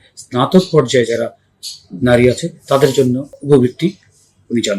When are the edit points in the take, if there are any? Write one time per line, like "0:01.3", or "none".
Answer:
0:03.3